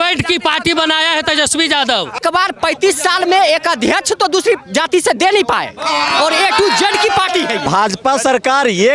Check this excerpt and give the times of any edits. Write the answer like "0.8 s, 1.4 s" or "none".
2.2 s, 7.6 s